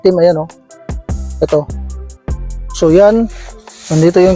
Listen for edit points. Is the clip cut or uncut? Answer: uncut